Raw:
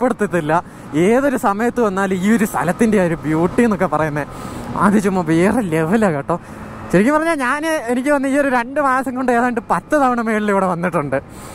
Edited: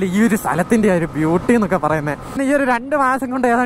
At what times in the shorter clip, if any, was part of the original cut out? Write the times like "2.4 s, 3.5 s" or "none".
2.4 s

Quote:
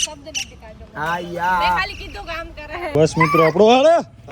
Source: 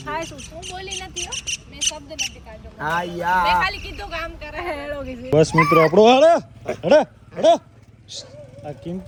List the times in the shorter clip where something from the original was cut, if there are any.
2.9 s

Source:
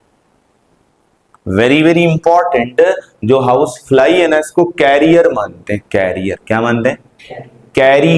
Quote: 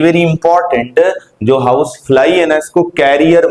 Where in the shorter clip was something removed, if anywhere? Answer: none

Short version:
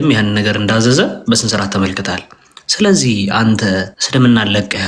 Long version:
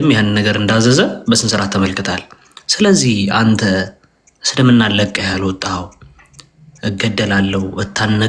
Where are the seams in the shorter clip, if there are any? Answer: 4.0 s

